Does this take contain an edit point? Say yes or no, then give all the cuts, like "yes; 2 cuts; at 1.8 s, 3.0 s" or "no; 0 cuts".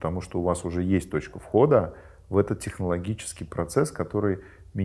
no; 0 cuts